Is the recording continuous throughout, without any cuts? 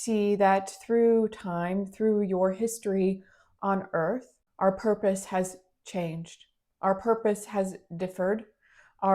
no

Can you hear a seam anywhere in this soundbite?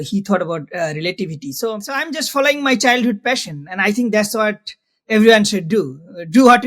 yes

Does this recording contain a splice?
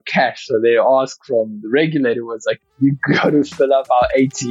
no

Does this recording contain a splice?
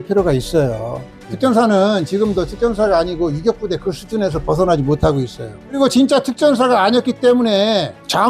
yes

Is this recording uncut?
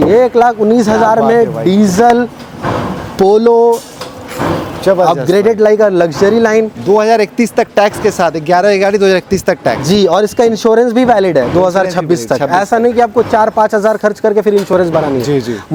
yes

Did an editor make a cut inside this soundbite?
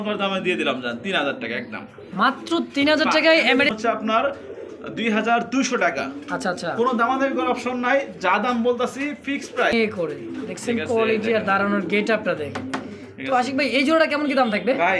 yes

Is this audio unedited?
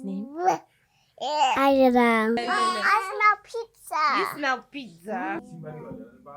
no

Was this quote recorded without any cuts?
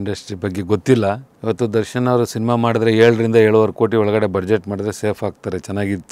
no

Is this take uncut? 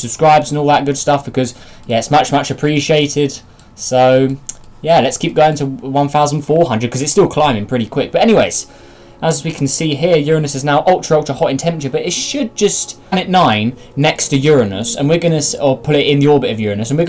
yes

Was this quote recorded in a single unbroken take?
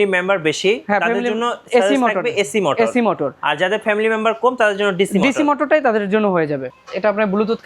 no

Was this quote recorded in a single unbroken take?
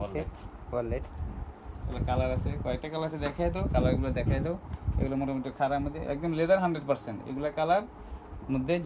yes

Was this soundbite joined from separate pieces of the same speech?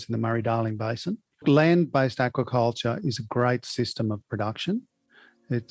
yes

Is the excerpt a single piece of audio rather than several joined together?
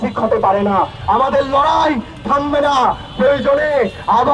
no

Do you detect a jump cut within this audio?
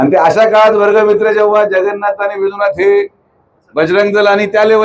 yes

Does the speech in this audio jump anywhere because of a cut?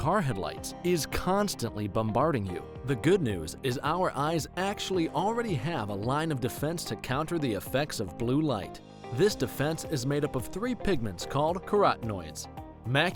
no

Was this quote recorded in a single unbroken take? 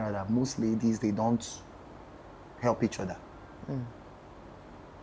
yes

